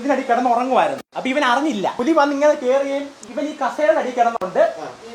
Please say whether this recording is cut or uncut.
cut